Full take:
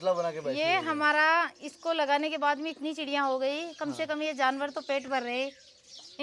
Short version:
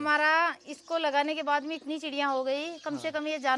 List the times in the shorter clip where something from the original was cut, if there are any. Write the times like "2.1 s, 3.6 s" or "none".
none